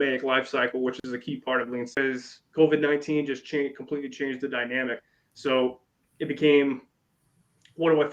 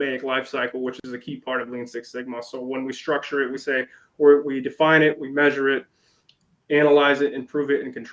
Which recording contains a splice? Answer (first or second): first